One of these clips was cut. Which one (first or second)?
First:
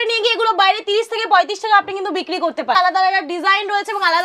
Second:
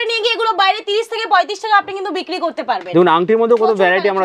first